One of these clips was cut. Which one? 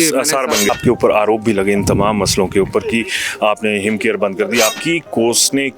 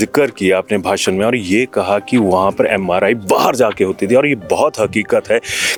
first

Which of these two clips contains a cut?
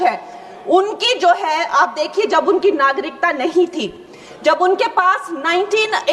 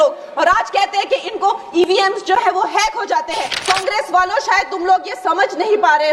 second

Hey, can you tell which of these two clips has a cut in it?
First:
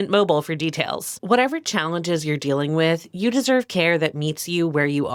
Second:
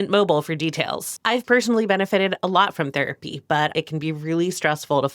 second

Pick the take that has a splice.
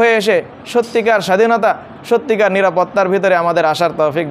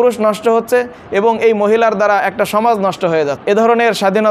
second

